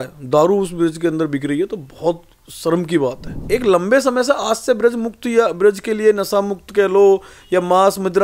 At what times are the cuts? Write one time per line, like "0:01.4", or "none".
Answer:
0:03.3